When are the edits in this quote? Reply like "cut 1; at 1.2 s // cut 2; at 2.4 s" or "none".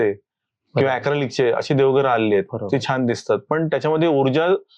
none